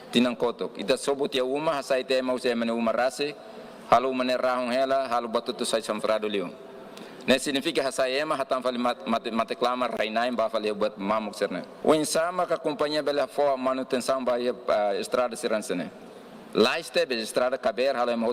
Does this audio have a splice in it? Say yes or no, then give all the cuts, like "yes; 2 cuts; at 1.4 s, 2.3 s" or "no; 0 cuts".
yes; 1 cut; at 11.7 s